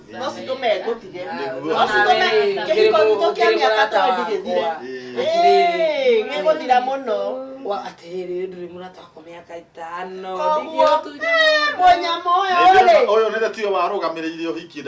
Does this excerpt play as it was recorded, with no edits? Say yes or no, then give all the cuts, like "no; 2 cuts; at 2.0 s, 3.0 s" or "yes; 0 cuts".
yes; 0 cuts